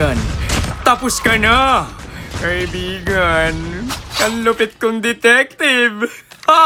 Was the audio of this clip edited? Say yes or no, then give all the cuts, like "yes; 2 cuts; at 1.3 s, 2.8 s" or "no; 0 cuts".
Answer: no; 0 cuts